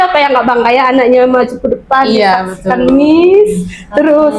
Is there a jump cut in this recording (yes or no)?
no